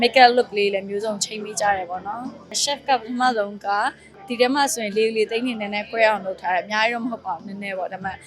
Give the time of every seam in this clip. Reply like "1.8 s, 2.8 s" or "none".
2.6 s, 4.2 s